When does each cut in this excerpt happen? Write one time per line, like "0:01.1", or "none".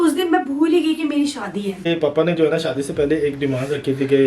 0:01.8

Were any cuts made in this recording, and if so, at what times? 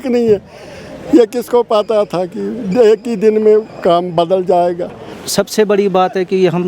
0:05.2

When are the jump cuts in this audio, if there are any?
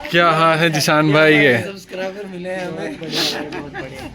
none

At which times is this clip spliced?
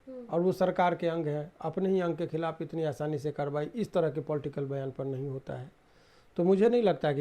none

